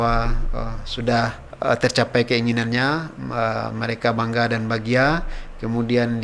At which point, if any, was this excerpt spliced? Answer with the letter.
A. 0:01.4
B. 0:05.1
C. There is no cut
A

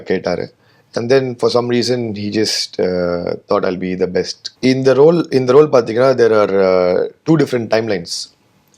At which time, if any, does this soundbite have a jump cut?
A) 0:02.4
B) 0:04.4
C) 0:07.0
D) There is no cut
B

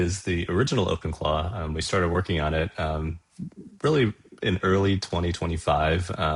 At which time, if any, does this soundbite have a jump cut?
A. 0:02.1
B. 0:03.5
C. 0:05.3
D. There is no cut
D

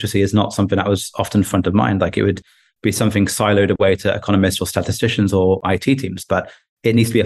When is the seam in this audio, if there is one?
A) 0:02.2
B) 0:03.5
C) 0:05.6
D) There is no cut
C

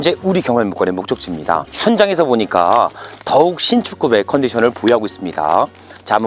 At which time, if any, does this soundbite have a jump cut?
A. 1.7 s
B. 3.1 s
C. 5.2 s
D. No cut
A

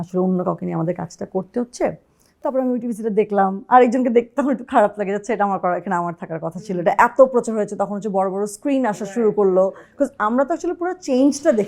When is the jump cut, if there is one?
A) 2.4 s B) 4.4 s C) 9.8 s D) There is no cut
A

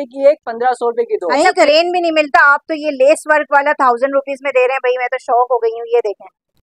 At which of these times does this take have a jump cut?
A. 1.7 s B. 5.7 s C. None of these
A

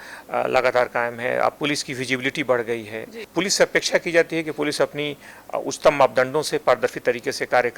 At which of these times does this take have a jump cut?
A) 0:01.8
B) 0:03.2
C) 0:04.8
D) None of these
B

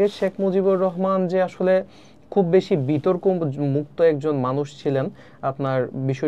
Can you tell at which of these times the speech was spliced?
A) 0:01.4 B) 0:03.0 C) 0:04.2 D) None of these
D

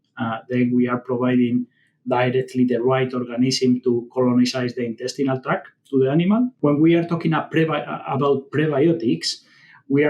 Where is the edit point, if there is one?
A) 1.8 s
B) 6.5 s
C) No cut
B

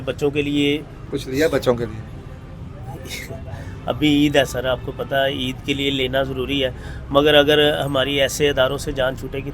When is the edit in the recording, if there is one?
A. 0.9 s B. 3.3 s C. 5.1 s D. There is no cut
A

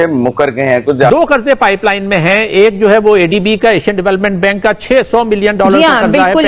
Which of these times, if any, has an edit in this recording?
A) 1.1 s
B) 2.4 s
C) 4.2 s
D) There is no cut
A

